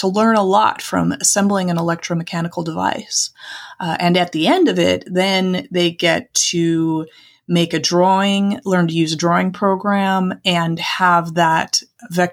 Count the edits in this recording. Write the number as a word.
zero